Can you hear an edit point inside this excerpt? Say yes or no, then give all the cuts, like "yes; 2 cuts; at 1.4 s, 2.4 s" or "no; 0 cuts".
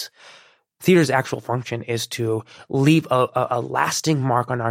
no; 0 cuts